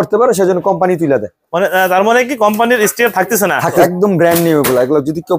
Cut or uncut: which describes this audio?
cut